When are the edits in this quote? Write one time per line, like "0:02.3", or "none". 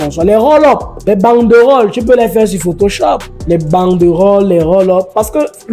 0:00.9
0:03.3